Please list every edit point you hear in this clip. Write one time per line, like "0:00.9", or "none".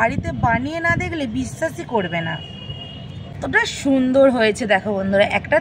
0:03.4